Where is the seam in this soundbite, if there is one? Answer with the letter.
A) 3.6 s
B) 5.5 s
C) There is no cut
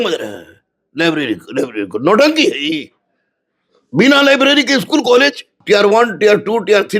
B